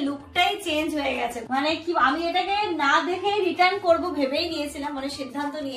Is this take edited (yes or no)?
yes